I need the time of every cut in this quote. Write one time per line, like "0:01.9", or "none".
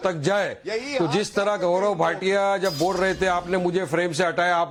none